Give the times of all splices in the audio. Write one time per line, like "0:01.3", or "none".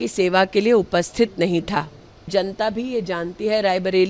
0:02.3